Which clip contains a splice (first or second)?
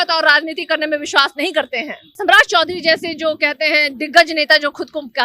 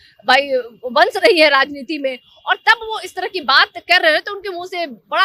first